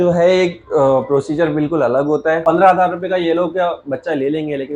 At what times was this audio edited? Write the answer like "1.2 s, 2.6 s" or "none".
2.4 s